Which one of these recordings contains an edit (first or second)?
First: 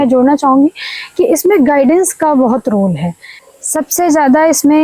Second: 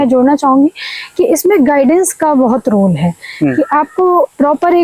first